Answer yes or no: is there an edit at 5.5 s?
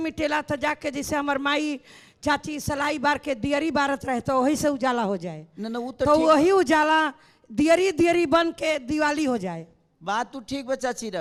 no